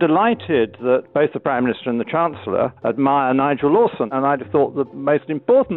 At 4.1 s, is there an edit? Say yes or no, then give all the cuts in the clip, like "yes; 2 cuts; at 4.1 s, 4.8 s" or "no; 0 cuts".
yes; 2 cuts; at 2.8 s, 4.1 s